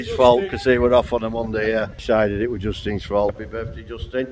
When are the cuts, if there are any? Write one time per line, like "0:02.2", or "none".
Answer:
0:01.9
0:03.3